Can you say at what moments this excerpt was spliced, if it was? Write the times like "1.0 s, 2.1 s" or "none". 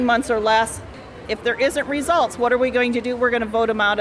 1.2 s